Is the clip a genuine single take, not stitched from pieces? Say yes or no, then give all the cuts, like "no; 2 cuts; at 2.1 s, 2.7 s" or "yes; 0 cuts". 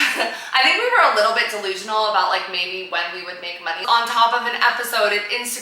no; 1 cut; at 3.8 s